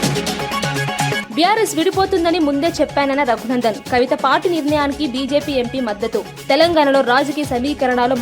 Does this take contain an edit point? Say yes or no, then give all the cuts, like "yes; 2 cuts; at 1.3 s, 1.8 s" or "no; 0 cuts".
yes; 1 cut; at 1.2 s